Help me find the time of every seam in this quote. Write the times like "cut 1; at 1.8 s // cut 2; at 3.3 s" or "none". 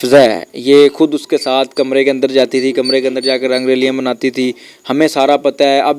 none